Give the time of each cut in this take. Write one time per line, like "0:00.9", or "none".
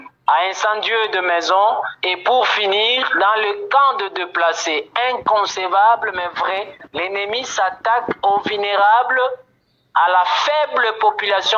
none